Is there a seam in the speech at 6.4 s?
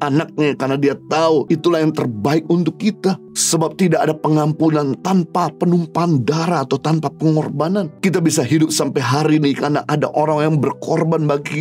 no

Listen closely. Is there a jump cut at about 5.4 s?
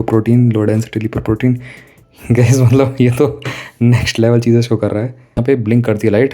yes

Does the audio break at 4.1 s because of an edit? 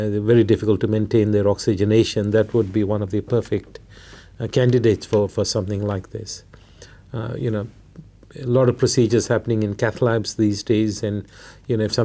no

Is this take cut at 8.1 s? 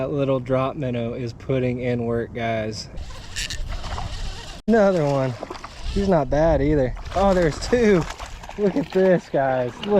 no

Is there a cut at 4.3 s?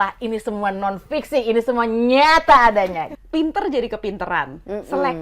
no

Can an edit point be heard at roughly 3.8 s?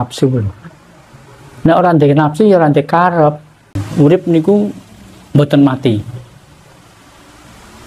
yes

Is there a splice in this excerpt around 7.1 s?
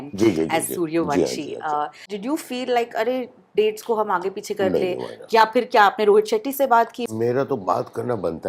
yes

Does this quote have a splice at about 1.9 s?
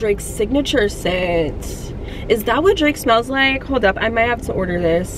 no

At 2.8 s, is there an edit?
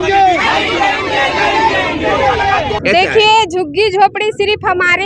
yes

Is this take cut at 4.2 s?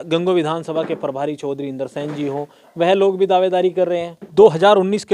yes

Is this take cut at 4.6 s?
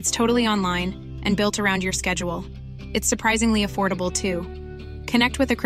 no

